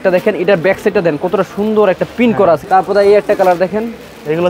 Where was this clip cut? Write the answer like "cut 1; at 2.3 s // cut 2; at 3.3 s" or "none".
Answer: cut 1; at 2.6 s

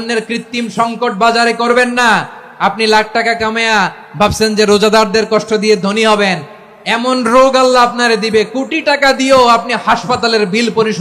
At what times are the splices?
none

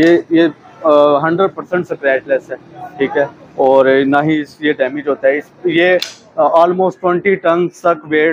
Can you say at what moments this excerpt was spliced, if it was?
none

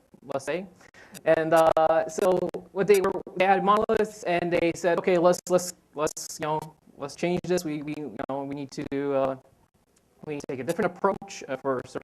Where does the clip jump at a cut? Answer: cut 1; at 1.9 s

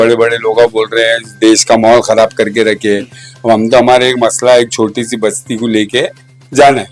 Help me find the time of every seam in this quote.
none

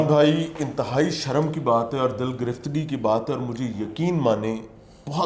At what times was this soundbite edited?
none

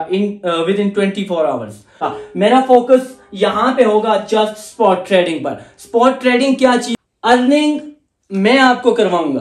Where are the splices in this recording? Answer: cut 1; at 2.0 s // cut 2; at 6.9 s

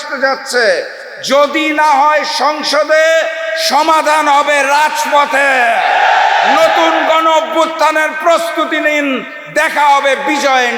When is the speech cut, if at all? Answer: none

